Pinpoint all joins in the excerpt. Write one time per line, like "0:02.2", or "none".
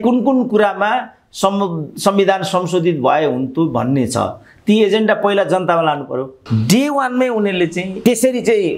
0:06.4
0:07.9